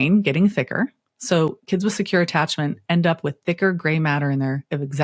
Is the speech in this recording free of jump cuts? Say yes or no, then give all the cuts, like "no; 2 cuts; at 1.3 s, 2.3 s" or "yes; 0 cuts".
yes; 0 cuts